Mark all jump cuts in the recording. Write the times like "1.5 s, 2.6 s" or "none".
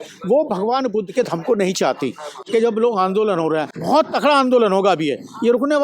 2.4 s, 3.7 s